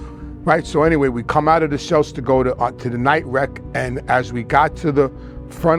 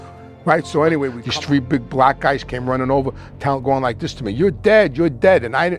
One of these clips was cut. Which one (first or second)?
second